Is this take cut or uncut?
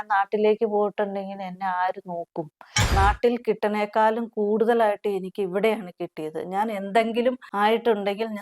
cut